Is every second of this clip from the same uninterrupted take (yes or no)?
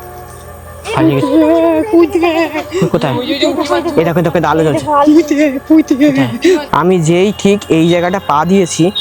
no